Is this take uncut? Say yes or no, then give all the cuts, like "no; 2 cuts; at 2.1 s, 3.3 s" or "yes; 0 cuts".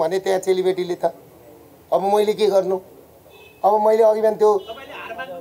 yes; 0 cuts